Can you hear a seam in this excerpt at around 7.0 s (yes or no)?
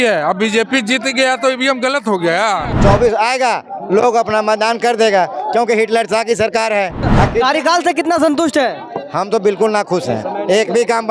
yes